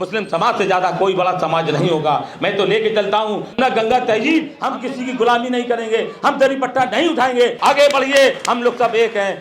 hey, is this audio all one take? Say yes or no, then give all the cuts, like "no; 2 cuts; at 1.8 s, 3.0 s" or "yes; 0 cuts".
no; 3 cuts; at 3.5 s, 4.6 s, 7.6 s